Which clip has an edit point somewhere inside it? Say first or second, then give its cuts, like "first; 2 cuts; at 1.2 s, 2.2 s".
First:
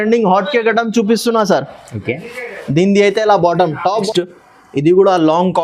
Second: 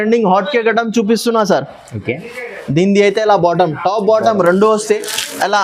first; 1 cut; at 4.1 s